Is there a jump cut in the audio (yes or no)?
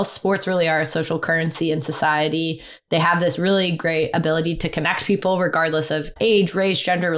no